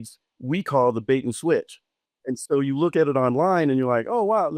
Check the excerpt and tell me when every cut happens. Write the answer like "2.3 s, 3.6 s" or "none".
2.4 s

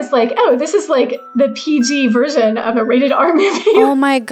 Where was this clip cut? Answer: none

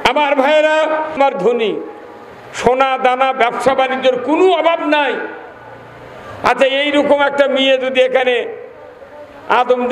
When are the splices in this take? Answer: 1.2 s

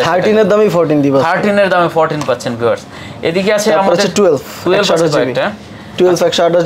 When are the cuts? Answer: none

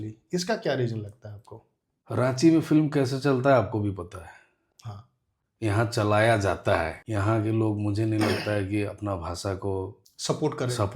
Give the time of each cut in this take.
7.0 s

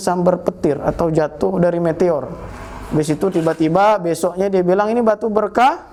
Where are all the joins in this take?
none

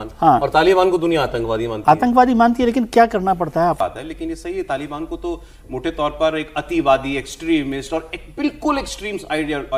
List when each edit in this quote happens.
3.8 s

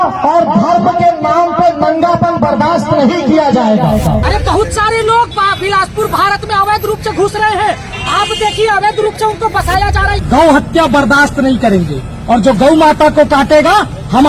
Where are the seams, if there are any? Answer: 4.2 s, 10.2 s

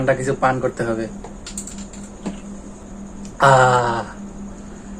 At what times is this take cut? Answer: 1.2 s, 2.8 s

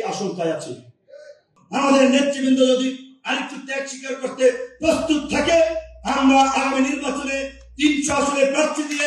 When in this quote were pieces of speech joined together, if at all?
1.6 s

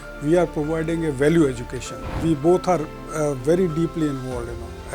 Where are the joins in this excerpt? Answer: 2.2 s

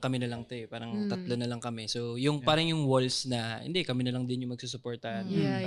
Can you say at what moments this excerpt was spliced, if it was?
none

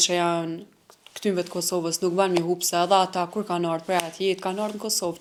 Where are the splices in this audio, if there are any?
none

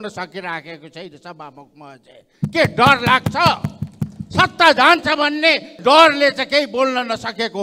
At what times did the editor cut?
5.7 s

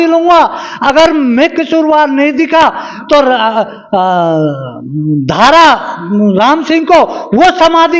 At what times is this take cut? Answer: none

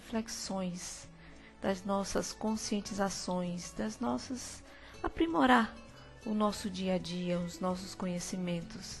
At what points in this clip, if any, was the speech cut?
7.7 s

